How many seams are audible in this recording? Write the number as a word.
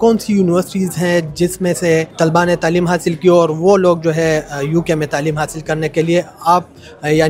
zero